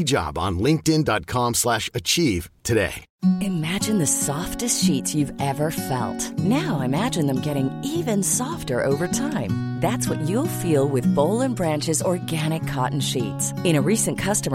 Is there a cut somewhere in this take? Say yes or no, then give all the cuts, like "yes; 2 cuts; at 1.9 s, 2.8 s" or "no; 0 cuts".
yes; 1 cut; at 3.0 s